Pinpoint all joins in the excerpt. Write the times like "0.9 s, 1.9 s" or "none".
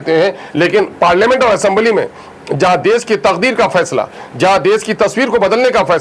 none